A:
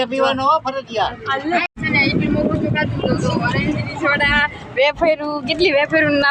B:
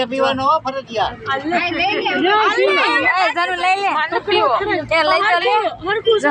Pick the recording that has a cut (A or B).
A